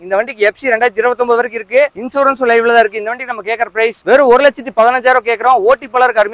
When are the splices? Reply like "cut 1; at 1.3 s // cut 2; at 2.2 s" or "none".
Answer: none